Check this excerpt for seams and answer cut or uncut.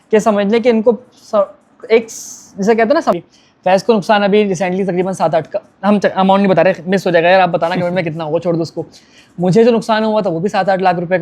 cut